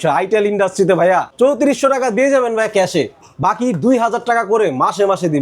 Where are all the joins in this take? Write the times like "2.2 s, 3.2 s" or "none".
1.3 s

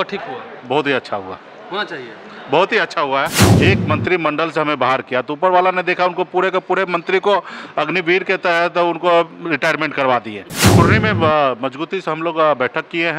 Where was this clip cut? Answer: 3.4 s, 10.6 s

